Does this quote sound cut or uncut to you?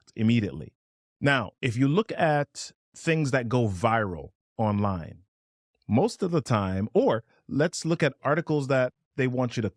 uncut